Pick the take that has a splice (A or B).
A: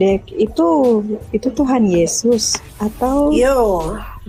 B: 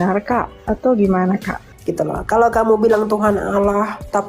B